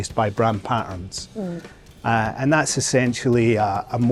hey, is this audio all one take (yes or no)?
yes